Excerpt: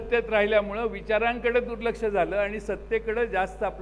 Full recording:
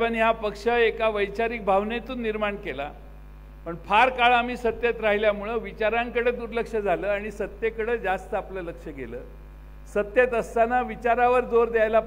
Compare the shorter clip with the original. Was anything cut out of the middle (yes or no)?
no